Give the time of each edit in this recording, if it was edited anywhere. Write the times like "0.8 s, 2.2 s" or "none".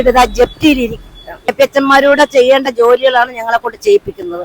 1.5 s